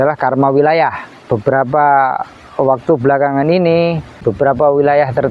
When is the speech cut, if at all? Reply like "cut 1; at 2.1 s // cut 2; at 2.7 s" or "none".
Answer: cut 1; at 1.2 s // cut 2; at 4.1 s